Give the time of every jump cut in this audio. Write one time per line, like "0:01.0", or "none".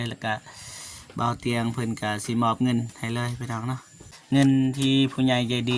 0:03.9